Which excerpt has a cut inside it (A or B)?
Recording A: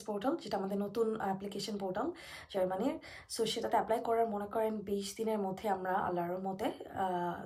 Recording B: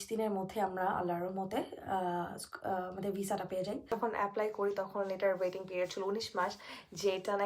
B